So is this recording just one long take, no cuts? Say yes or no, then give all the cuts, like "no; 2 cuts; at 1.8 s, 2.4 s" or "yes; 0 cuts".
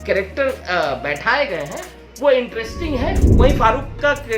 no; 1 cut; at 3.2 s